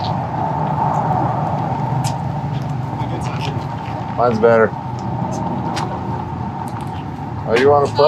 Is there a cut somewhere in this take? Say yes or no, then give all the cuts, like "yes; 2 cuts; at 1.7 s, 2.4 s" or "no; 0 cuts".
no; 0 cuts